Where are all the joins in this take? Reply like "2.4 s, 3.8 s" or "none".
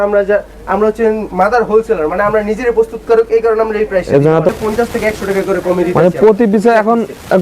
4.5 s